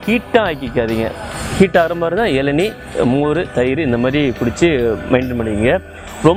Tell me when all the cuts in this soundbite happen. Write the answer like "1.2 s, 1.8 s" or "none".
none